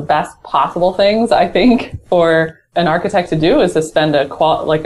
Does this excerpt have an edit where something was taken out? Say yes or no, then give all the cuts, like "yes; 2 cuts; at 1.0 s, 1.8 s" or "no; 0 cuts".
yes; 1 cut; at 2.6 s